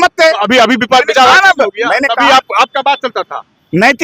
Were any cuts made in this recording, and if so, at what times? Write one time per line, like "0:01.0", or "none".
none

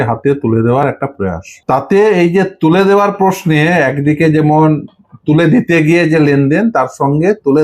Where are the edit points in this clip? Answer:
0:01.5

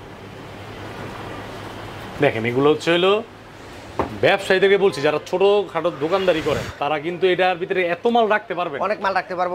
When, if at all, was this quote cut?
none

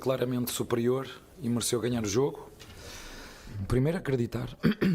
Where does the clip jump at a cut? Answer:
0:03.5

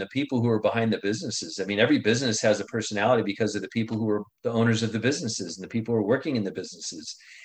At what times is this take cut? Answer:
0:04.3

